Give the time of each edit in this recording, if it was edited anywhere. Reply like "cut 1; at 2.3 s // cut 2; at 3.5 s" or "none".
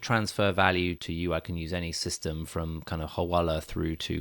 cut 1; at 1.0 s